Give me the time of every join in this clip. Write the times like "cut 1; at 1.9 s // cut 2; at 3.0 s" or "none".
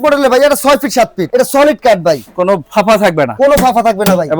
cut 1; at 1.2 s